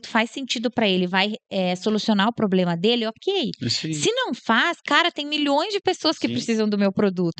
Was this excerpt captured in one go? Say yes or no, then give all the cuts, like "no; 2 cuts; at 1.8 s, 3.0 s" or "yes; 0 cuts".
yes; 0 cuts